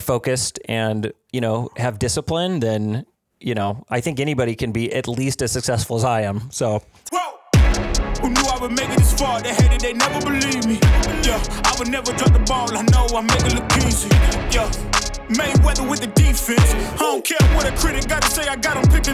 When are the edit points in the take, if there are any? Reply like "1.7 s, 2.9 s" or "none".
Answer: 7.0 s